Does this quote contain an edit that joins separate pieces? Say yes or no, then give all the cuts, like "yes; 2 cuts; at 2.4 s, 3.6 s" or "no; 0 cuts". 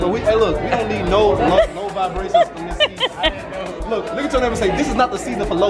no; 0 cuts